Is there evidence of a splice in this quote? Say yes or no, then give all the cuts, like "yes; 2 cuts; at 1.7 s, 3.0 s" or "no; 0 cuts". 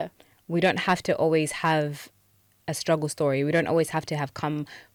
no; 0 cuts